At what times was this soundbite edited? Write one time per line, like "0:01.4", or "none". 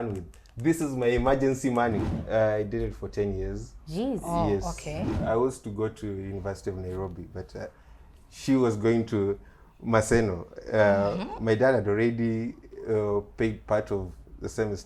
0:02.2
0:05.1